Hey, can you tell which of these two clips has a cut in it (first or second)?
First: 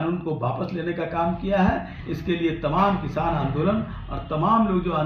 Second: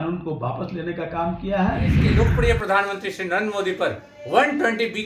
second